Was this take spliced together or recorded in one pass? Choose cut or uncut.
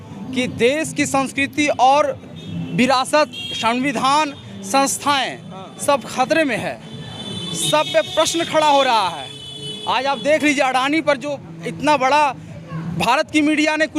uncut